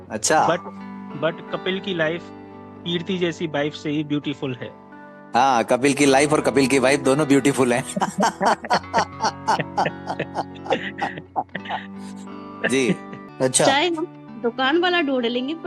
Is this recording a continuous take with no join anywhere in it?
no; 1 cut; at 13.2 s

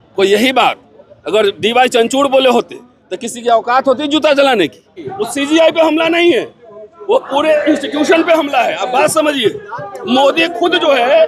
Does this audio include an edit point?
yes; 1 cut; at 5.2 s

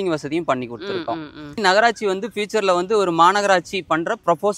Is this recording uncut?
no; 1 cut; at 1.6 s

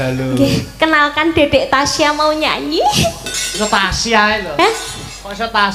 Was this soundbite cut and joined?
no; 0 cuts

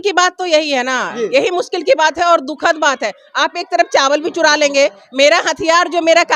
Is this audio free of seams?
yes; 0 cuts

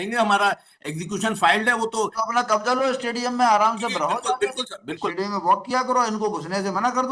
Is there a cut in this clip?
yes; 2 cuts; at 2.1 s, 5.1 s

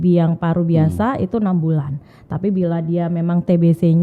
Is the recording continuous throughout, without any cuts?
yes; 0 cuts

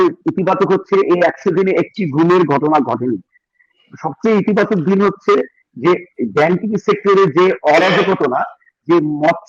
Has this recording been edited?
no; 0 cuts

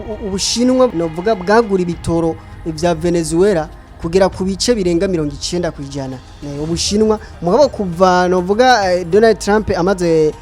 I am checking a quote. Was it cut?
yes; 1 cut; at 0.9 s

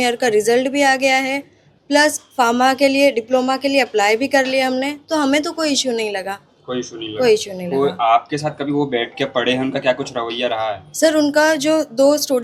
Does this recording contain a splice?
no; 0 cuts

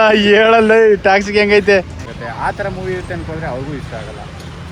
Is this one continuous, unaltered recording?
no; 1 cut; at 2.1 s

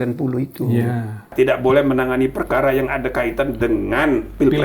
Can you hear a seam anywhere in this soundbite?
yes; 1 cut; at 1.3 s

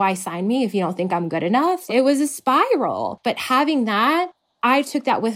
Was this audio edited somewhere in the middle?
yes; 2 cuts; at 3.1 s, 4.4 s

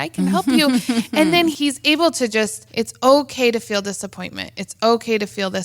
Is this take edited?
yes; 2 cuts; at 1.5 s, 2.6 s

